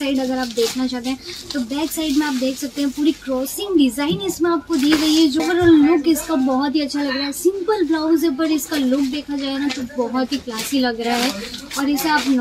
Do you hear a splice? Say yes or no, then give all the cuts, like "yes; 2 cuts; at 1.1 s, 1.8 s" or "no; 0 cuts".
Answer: yes; 1 cut; at 5.4 s